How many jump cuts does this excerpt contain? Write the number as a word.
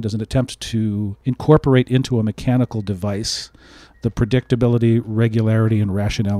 one